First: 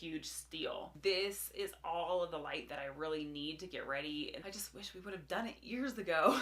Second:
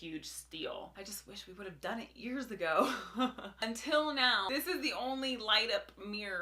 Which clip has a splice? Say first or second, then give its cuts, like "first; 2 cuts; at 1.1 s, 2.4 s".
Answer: first; 2 cuts; at 0.9 s, 4.4 s